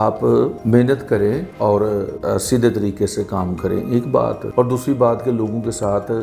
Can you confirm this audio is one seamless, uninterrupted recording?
yes; 0 cuts

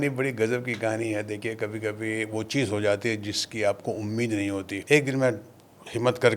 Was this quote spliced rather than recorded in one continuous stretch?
yes; 1 cut; at 4.7 s

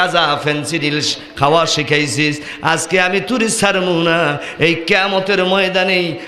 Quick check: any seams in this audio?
no; 0 cuts

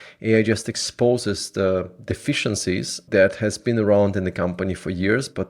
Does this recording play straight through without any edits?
no; 1 cut; at 3.0 s

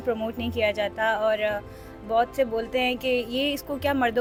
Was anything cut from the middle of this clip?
no; 0 cuts

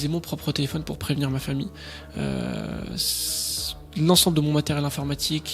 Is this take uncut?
yes; 0 cuts

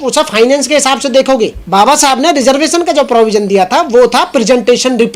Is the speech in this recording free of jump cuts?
no; 1 cut; at 1.6 s

